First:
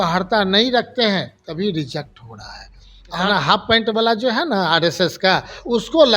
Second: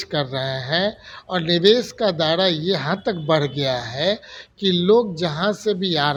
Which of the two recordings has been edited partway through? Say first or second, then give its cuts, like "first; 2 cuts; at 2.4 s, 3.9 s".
first; 1 cut; at 3.2 s